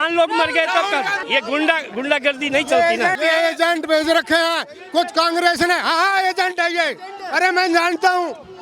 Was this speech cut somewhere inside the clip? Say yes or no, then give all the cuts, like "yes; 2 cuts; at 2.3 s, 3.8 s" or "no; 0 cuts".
yes; 2 cuts; at 1.2 s, 3.2 s